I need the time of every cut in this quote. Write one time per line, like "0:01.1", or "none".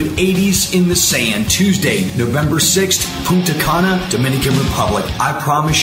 none